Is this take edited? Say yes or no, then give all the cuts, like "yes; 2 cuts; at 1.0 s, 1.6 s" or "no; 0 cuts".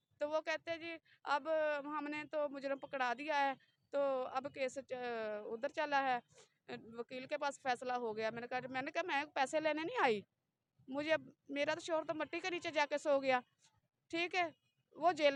no; 0 cuts